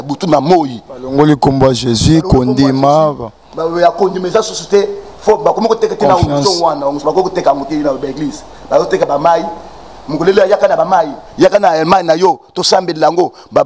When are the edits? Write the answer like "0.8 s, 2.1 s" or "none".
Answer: none